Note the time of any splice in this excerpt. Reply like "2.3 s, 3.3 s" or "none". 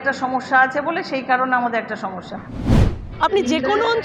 2.9 s

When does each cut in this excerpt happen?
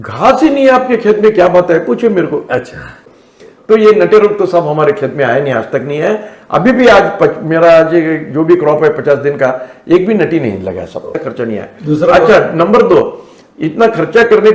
3.0 s, 11.2 s

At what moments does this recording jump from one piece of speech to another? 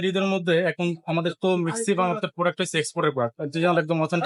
none

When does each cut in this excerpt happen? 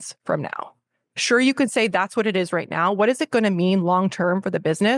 none

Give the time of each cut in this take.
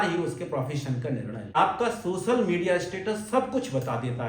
1.5 s

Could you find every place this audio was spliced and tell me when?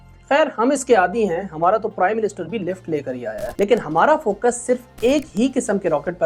3.4 s

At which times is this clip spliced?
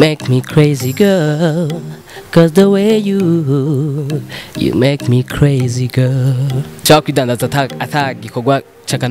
6.7 s

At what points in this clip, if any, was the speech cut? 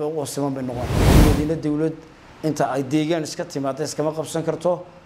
1.2 s

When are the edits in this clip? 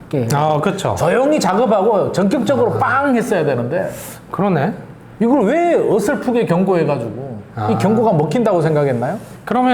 none

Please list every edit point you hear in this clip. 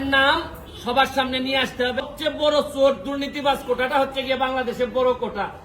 2.1 s

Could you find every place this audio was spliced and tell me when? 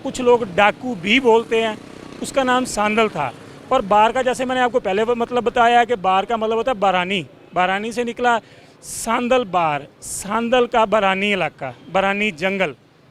none

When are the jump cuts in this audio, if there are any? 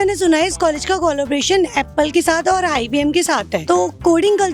none

